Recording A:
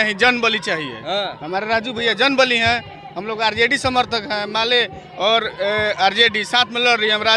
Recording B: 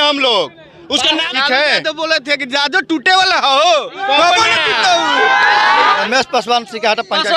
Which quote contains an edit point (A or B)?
B